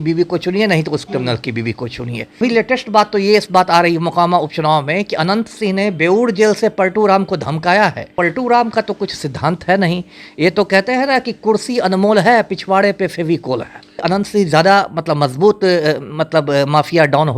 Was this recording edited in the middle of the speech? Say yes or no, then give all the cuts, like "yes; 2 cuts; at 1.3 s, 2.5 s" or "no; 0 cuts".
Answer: yes; 3 cuts; at 2.4 s, 8.1 s, 14.0 s